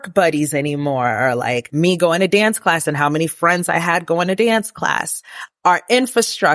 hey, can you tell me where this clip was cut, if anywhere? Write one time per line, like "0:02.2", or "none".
0:01.7
0:05.4